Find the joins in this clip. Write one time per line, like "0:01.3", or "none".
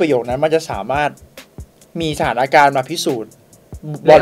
none

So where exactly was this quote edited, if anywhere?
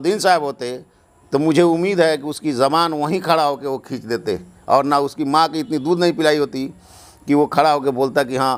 none

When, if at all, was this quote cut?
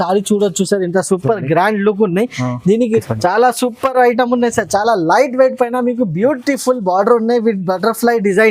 0:02.8

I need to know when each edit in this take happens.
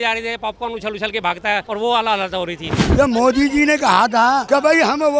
0:01.6
0:02.7
0:04.4

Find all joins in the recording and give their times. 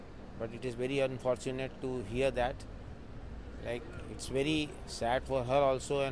none

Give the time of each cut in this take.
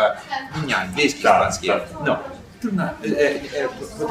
none

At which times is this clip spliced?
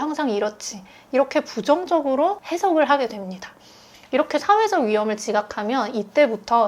0:02.5

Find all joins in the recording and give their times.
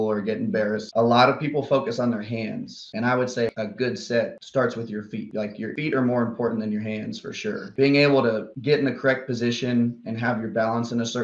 0:00.8
0:02.8
0:03.5
0:05.7
0:07.7

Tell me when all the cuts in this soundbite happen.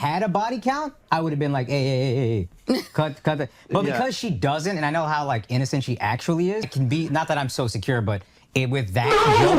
0:06.6

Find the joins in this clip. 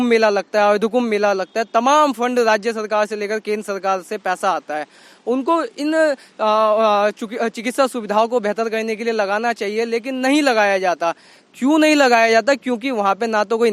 none

